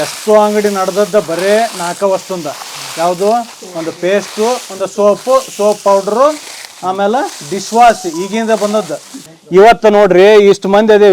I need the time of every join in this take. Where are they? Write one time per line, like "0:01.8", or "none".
0:09.3